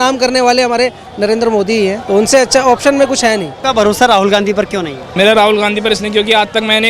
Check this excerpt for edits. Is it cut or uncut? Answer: cut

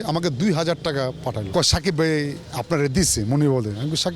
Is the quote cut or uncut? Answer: cut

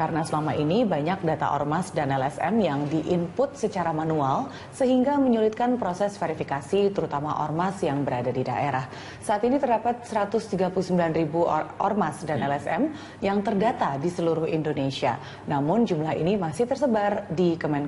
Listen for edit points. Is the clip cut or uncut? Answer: uncut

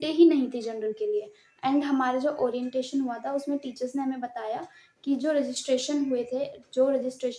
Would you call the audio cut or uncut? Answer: uncut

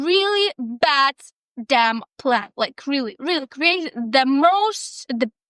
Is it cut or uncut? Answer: uncut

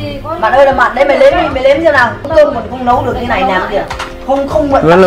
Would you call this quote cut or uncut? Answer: cut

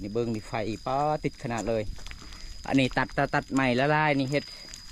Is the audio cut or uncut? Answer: uncut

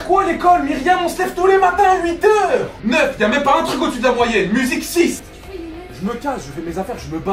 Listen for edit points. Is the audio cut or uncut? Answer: cut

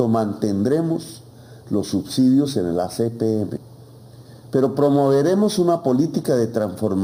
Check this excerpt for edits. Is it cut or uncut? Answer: uncut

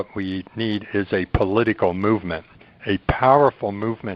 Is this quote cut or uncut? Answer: uncut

